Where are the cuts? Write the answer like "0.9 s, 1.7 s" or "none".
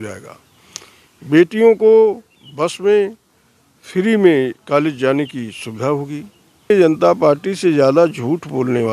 6.7 s